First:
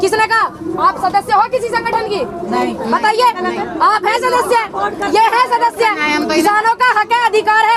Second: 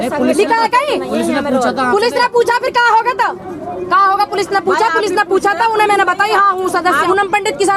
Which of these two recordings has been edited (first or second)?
second